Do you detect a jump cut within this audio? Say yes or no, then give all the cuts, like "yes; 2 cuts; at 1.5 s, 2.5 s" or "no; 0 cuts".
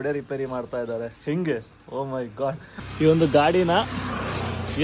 yes; 1 cut; at 2.7 s